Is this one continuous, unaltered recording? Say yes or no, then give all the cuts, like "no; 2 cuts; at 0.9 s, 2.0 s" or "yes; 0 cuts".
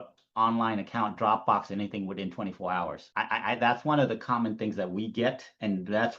no; 1 cut; at 3.0 s